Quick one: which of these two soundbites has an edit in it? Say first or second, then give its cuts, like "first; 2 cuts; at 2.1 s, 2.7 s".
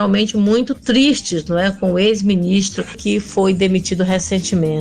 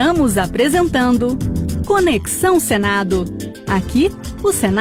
first; 1 cut; at 3.0 s